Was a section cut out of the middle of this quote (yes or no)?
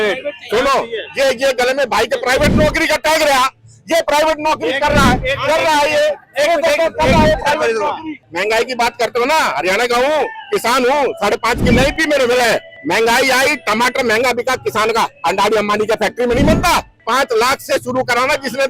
yes